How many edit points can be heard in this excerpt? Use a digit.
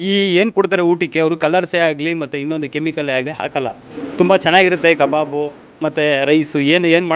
0